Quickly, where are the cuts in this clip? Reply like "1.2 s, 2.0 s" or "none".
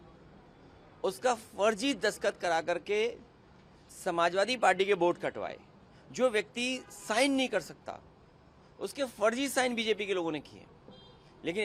none

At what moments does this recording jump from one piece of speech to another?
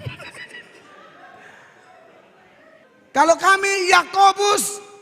2.8 s

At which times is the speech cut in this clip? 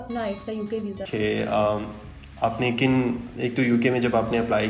1.0 s

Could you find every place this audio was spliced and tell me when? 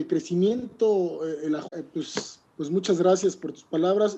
none

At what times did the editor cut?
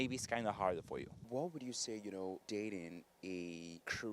1.2 s

